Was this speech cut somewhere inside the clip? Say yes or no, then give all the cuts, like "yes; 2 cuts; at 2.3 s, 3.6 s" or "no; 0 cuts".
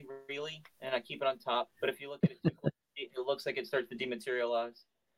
yes; 1 cut; at 1.7 s